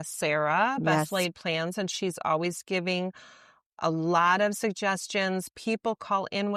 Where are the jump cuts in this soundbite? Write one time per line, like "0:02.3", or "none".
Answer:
none